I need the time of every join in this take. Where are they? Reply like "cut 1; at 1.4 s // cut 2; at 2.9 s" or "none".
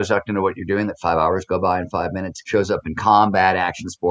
cut 1; at 2.3 s